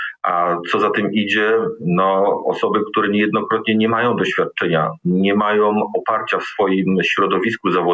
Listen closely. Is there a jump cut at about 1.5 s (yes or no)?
no